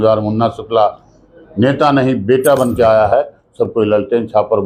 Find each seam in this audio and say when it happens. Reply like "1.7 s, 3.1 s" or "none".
none